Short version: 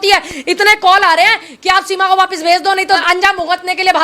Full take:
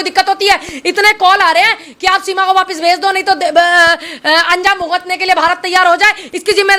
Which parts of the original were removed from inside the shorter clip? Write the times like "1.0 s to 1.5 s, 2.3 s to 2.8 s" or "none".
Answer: 3.4 s to 4.4 s